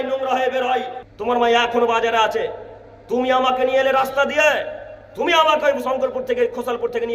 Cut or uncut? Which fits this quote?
cut